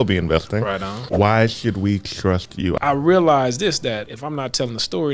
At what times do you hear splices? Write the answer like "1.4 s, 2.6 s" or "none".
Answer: 1.0 s, 2.8 s, 4.1 s